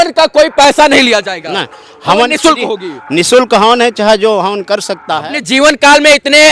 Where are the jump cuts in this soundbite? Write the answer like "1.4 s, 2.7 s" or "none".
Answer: 5.2 s